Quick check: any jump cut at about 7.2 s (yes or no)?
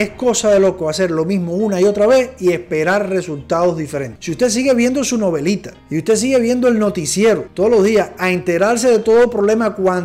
no